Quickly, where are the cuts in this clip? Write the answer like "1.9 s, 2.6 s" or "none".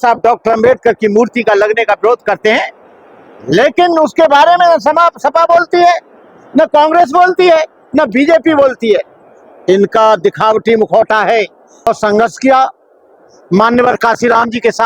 11.9 s